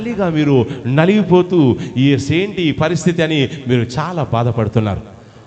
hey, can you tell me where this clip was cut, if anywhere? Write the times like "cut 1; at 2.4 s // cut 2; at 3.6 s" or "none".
none